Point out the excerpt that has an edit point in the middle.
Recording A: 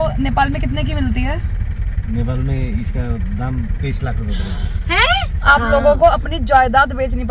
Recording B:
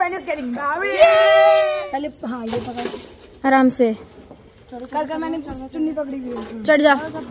B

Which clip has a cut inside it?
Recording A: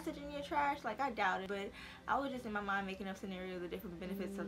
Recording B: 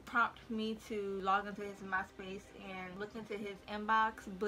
A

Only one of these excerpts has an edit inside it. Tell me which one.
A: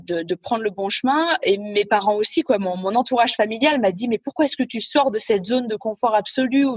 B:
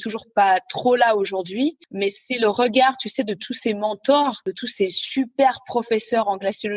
B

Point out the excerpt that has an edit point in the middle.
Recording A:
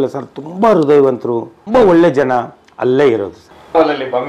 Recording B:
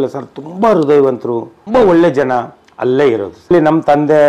B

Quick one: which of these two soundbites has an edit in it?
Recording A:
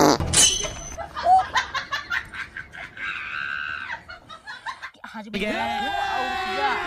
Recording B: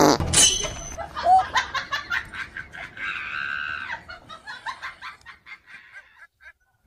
A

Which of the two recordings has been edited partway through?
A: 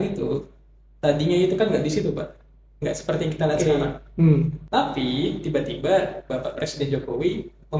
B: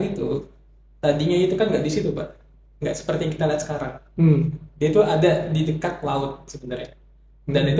A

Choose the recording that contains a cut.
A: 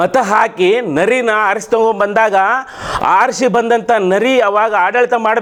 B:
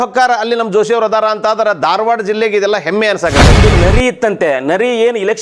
B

